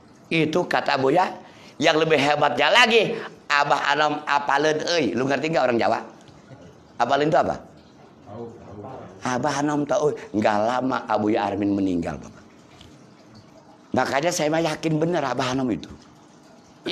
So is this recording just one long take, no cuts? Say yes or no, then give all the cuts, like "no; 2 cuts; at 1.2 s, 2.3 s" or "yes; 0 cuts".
no; 1 cut; at 13.5 s